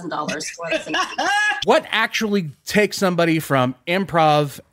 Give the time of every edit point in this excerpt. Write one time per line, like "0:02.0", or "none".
0:01.6